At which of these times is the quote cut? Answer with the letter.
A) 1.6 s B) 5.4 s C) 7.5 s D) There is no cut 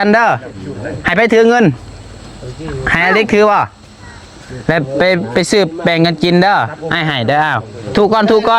D